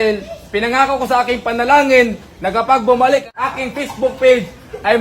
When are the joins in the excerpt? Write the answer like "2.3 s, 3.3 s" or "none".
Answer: 3.3 s